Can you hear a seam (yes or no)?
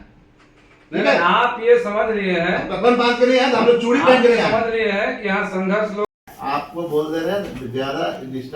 yes